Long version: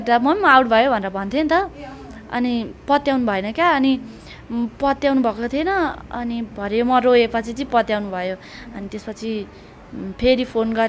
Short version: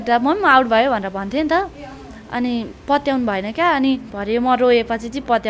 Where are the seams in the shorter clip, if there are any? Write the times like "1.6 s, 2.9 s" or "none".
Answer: 4.1 s